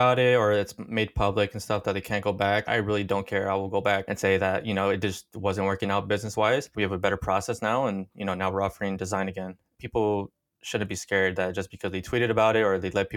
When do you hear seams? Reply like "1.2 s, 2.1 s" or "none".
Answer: none